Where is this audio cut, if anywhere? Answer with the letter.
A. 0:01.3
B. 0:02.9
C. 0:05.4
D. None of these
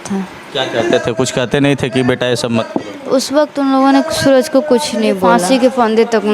C